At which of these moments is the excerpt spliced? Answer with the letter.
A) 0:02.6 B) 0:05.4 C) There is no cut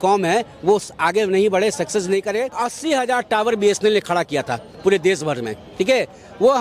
A